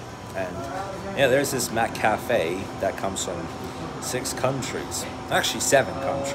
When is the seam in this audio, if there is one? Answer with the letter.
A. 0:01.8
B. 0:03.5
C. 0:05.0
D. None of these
D